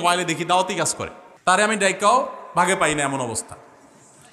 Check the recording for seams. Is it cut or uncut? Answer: cut